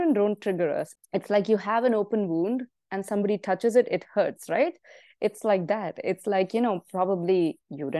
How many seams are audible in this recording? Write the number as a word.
one